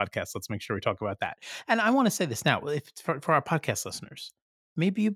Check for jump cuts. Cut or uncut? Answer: cut